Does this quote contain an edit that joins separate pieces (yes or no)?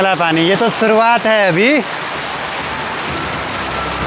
no